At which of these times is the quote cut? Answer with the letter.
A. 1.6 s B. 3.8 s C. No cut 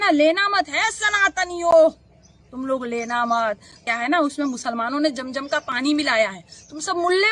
B